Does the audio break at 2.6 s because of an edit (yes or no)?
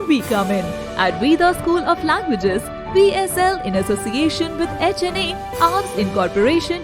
no